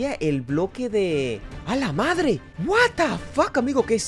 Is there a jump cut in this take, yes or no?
no